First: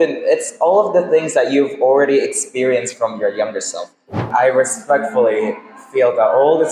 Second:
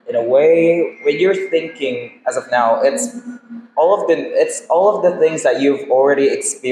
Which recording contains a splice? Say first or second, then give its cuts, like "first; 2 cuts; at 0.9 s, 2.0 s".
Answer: first; 1 cut; at 4.1 s